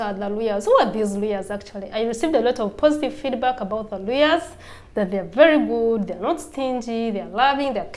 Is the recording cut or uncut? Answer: uncut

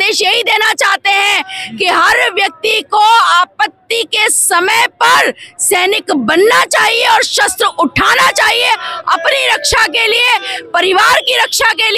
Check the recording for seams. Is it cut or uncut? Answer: uncut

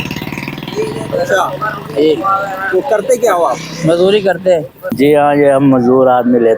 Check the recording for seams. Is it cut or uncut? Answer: cut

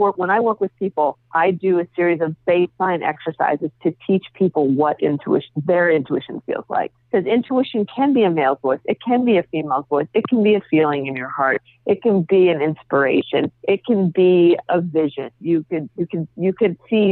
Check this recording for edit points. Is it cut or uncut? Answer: cut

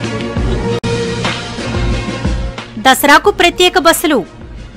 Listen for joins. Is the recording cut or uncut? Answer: cut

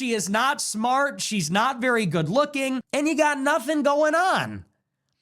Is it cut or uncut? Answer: cut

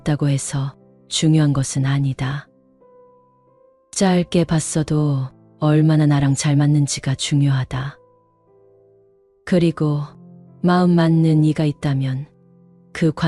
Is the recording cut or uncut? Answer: cut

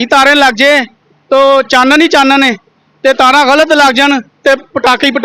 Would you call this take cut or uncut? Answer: uncut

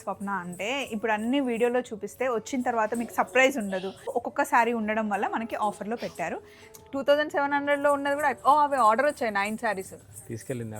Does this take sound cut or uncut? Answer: cut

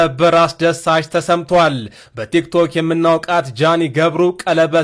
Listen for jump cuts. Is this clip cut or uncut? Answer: uncut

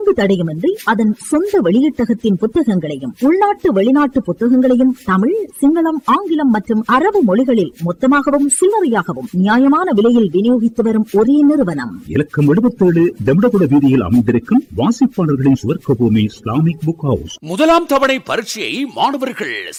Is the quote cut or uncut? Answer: uncut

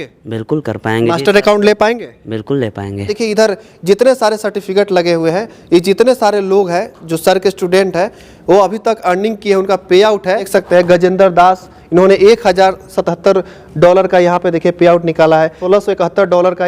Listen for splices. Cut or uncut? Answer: cut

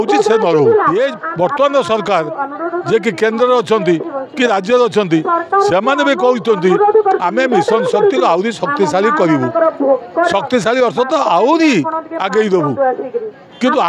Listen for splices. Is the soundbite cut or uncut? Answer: cut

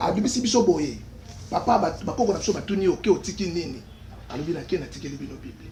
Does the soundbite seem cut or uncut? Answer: uncut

